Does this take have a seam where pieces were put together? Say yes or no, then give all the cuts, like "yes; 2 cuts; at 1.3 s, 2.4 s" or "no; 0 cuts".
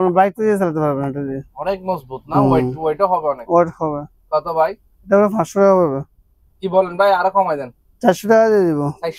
no; 0 cuts